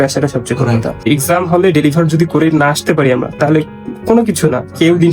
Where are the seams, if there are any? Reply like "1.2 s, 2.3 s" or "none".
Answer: 1.0 s